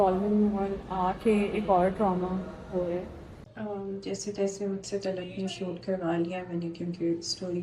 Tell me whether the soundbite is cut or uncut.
cut